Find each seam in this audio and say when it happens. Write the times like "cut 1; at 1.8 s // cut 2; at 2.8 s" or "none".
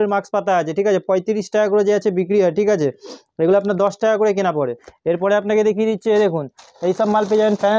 none